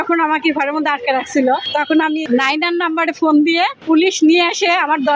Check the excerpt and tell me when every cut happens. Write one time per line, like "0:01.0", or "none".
0:02.1
0:03.8